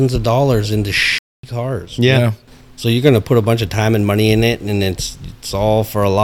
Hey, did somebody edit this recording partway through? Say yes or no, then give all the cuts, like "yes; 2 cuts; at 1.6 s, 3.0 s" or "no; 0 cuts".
yes; 1 cut; at 2.4 s